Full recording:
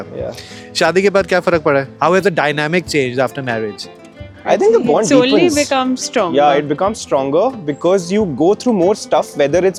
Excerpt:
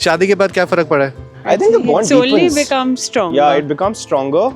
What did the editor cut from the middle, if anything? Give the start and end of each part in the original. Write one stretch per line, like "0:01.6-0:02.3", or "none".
0:01.9-0:04.2